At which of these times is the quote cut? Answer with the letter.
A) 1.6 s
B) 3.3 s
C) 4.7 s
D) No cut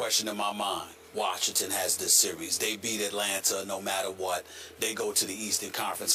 B